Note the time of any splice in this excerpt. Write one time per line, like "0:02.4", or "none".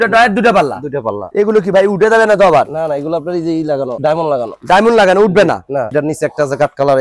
0:01.2
0:05.9